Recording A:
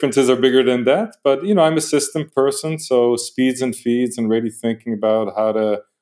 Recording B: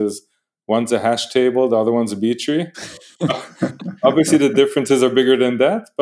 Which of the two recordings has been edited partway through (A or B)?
A